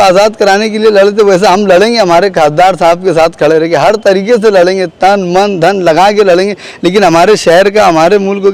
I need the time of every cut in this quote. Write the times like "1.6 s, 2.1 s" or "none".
none